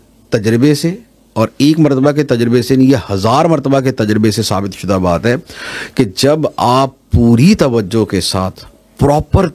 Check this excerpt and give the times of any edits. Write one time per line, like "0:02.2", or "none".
none

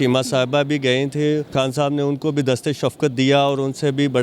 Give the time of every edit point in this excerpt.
0:01.5

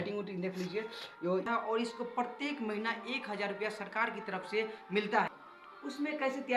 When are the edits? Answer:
0:01.5
0:05.3

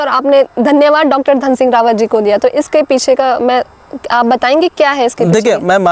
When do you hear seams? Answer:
none

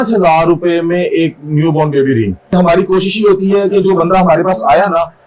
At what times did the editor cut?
0:02.5

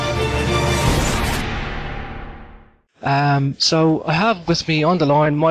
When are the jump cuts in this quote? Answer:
none

